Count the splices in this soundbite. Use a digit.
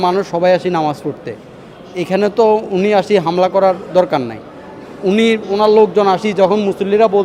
0